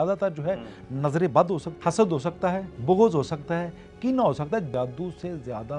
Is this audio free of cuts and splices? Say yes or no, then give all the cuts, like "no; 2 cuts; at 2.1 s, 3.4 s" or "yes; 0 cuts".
no; 3 cuts; at 1.7 s, 2.7 s, 4.7 s